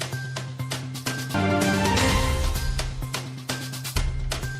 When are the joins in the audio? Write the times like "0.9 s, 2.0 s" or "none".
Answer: 1.2 s